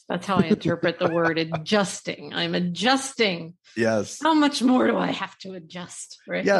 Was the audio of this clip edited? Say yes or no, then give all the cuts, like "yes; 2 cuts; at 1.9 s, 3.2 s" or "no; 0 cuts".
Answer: no; 0 cuts